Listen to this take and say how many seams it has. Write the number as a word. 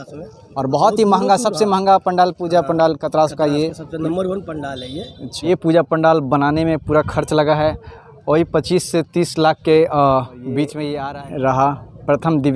two